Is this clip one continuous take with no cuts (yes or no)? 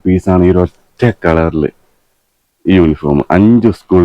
yes